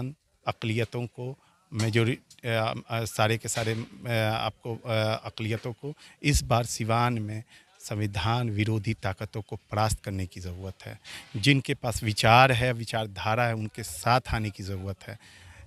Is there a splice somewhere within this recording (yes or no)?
no